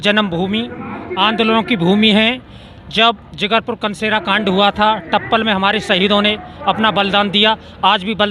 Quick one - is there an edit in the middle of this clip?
no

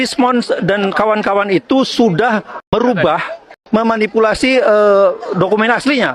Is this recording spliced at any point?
yes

